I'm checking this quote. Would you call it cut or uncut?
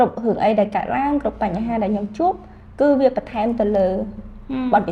uncut